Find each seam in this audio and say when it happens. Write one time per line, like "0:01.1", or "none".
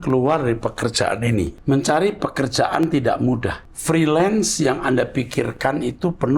0:01.6
0:03.7